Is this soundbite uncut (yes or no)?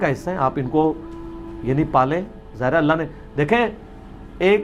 yes